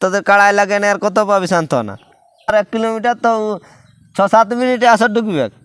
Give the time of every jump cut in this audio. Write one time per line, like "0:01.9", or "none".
0:02.5